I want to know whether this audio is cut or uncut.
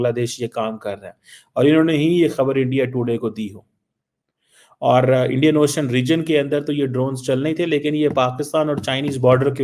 uncut